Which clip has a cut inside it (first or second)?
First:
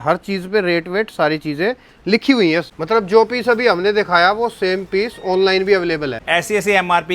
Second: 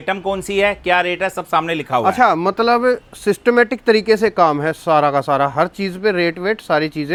first